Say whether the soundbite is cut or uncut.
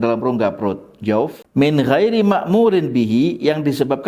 cut